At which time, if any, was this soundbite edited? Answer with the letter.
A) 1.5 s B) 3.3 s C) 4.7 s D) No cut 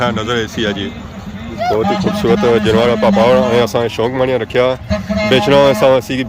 A